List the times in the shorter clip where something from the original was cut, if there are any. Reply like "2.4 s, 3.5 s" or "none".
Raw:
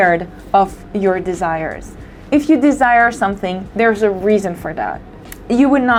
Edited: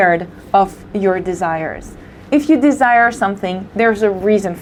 none